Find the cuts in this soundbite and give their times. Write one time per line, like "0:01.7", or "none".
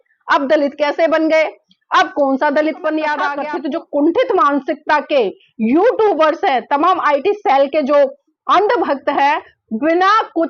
0:03.4

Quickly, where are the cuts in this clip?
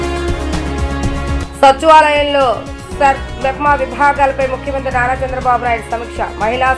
0:00.9

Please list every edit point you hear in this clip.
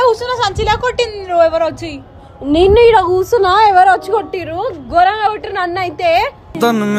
none

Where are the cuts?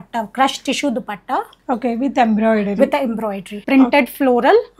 0:03.6

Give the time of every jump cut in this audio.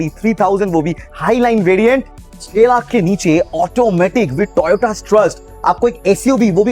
0:02.2

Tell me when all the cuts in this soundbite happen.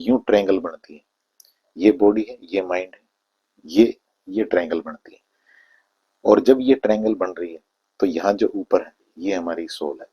none

